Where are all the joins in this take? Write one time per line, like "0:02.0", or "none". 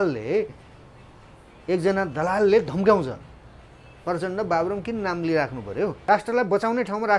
0:06.0